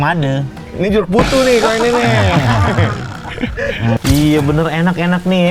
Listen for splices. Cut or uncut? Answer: cut